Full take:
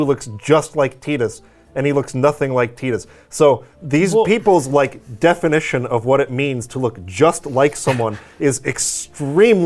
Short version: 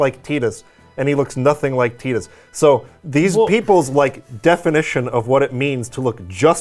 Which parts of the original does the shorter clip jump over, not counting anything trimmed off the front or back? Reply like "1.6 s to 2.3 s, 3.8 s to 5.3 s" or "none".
none